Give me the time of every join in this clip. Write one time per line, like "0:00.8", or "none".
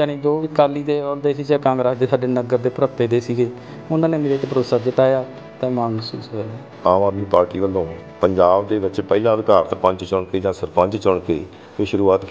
0:06.6